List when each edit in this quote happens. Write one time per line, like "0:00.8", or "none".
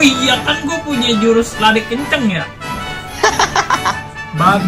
none